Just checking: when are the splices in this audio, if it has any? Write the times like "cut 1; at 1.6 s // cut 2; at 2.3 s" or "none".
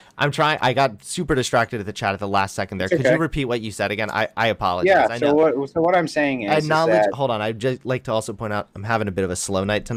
none